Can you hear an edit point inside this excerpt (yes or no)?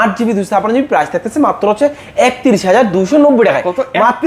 no